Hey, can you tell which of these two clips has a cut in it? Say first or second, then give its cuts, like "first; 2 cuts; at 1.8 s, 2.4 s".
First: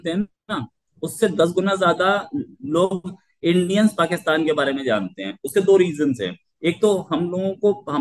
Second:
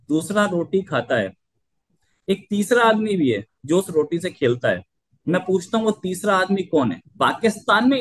second; 1 cut; at 7.0 s